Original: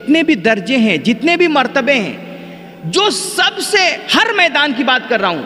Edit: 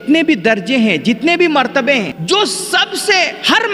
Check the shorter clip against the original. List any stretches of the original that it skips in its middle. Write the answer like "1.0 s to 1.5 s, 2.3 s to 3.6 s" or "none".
2.2 s to 2.8 s